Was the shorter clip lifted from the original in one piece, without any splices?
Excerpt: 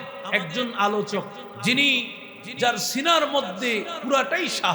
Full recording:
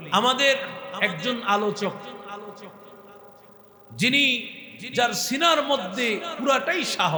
no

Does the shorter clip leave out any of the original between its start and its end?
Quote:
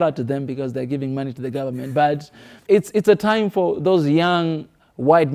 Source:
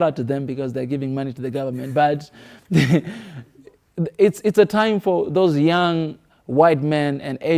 yes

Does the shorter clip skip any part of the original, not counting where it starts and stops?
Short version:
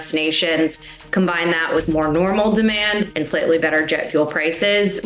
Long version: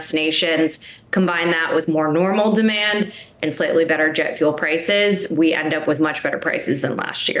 yes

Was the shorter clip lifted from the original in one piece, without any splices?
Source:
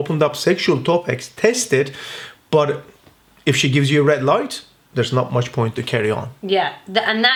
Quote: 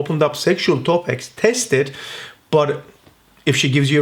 yes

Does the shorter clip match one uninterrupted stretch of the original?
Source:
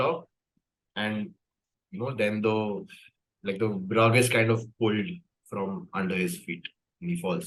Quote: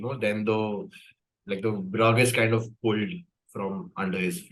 yes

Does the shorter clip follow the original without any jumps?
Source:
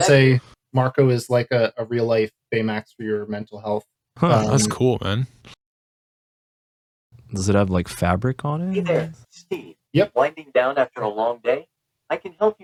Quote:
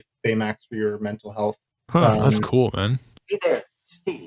no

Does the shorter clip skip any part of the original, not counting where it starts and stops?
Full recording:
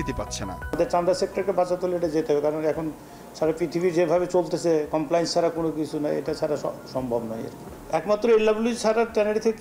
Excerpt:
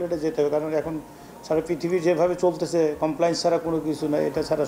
no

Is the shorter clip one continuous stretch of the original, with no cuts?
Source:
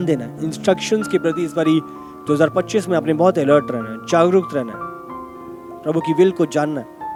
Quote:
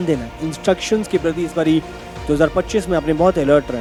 yes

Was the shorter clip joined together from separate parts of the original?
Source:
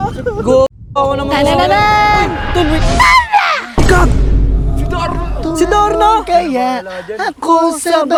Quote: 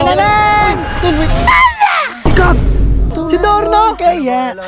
yes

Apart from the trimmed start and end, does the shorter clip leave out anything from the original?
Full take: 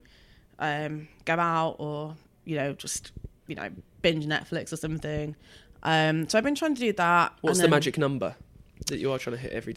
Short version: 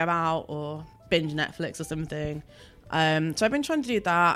yes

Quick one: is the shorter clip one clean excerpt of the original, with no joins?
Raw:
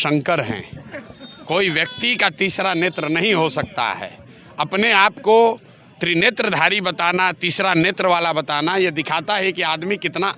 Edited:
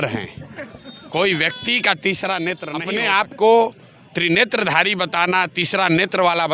no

